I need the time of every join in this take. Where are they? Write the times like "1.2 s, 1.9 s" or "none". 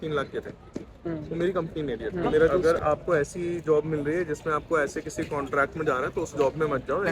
2.6 s

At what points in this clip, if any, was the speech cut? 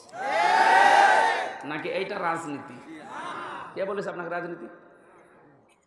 none

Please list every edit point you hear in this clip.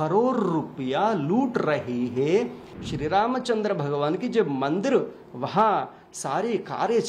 2.7 s

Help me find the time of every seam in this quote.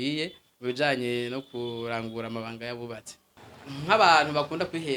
3.2 s

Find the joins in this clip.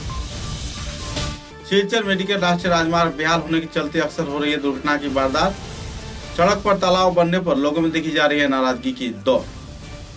1.1 s

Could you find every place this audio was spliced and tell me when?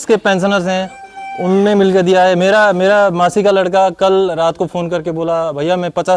none

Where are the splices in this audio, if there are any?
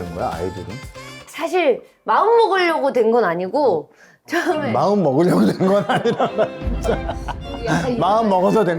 1.2 s

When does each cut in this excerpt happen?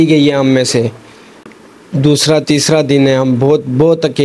1.3 s

